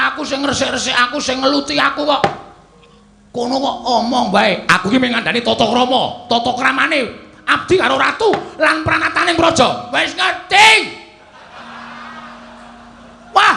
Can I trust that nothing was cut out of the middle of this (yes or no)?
yes